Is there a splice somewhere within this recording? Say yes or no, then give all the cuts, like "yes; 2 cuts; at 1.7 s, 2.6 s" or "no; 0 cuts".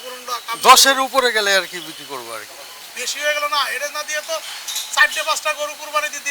yes; 1 cut; at 2.8 s